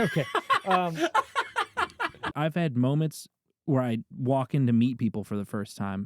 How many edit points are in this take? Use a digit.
1